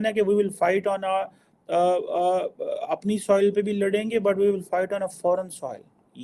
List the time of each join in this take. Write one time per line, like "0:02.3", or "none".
none

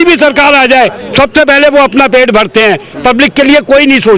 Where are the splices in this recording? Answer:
none

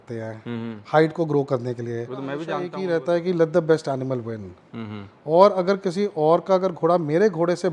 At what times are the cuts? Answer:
0:02.7

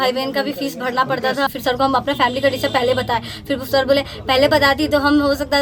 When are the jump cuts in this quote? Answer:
0:01.6

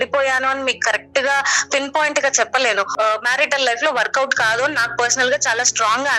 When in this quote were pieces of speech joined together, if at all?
0:02.9

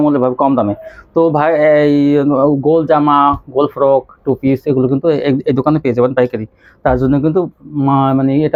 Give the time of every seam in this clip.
none

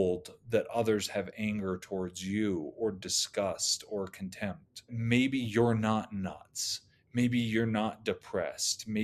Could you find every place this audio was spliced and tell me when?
0:04.9

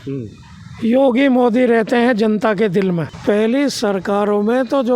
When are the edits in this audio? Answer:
0:03.1

